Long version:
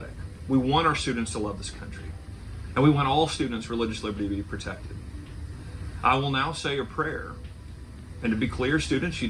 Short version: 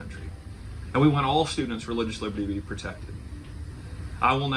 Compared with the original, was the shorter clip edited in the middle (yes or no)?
no